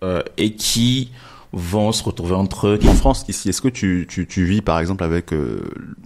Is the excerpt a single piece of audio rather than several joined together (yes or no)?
no